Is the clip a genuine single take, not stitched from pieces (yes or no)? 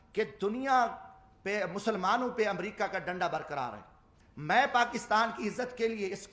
no